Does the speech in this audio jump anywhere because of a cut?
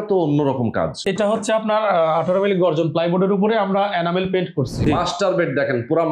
yes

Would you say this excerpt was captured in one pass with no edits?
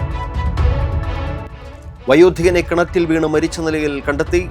no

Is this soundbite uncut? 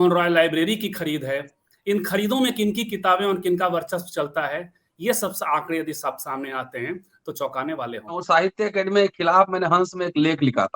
no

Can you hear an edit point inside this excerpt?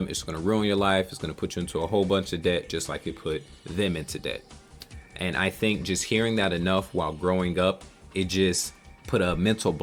no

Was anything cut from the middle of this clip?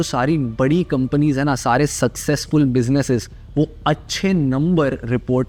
no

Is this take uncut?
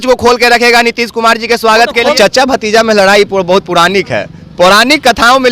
no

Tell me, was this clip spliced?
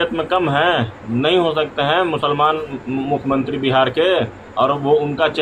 no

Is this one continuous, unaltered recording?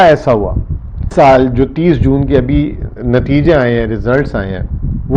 no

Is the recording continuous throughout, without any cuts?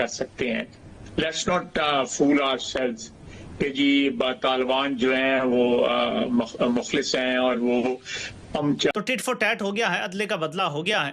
no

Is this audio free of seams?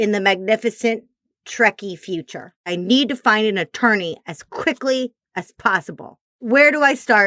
no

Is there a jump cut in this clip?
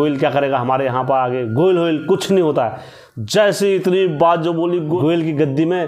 yes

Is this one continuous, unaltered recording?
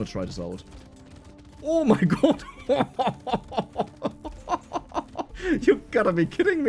no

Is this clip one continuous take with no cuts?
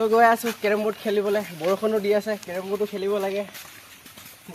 yes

